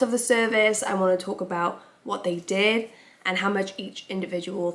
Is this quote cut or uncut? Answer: uncut